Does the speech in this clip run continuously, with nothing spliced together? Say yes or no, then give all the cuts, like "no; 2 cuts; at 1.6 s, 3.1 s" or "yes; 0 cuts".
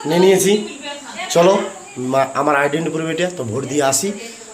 yes; 0 cuts